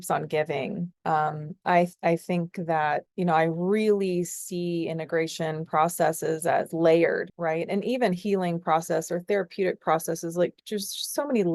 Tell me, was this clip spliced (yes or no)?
no